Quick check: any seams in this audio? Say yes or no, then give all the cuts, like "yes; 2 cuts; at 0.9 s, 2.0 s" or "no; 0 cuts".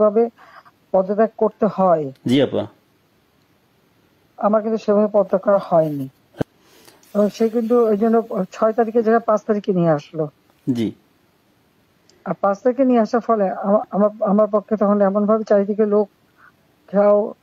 yes; 1 cut; at 6.4 s